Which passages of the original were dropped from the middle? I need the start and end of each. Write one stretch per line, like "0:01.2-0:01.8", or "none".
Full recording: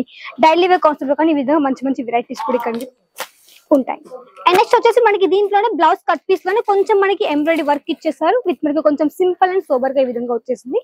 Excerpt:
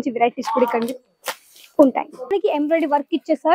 0:04.2-0:07.1